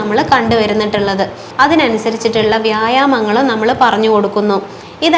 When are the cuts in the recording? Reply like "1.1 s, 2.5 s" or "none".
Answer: 1.4 s